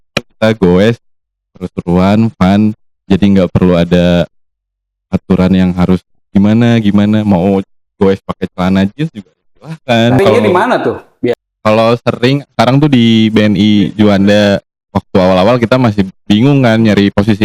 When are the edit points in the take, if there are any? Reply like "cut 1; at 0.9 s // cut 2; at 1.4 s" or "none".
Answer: cut 1; at 10.2 s